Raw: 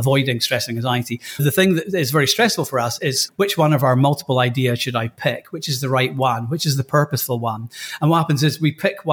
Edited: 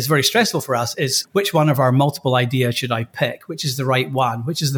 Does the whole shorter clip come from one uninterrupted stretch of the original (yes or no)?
yes